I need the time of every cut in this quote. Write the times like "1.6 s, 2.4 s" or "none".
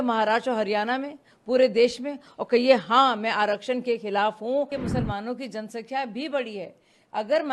4.7 s